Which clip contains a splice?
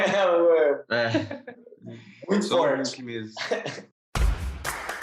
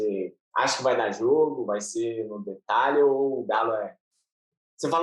first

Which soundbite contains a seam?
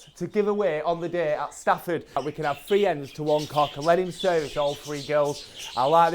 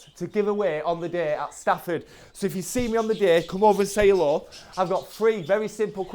first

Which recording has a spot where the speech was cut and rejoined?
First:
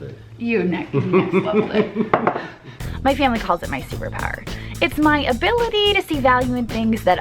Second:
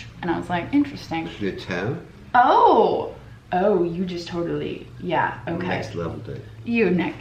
first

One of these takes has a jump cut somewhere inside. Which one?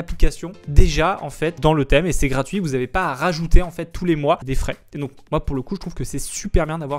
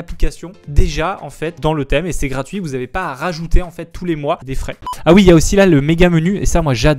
second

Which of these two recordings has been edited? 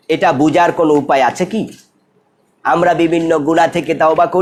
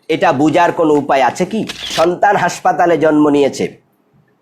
second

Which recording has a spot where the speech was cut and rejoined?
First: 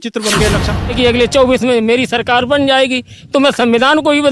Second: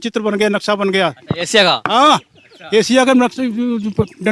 first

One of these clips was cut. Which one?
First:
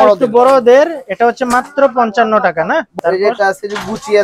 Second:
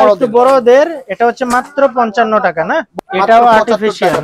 first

